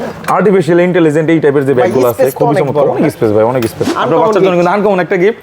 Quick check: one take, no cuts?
no; 1 cut; at 3.9 s

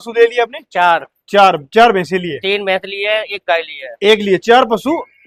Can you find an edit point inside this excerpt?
no; 0 cuts

